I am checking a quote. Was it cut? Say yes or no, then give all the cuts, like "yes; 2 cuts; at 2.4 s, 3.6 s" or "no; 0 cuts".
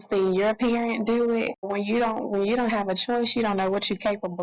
yes; 1 cut; at 1.7 s